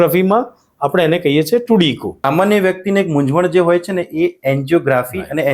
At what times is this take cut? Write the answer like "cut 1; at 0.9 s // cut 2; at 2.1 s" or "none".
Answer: cut 1; at 2.1 s